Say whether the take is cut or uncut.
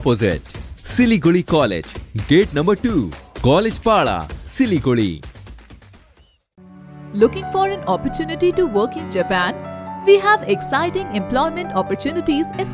uncut